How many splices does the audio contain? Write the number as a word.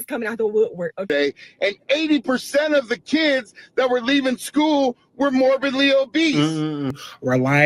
two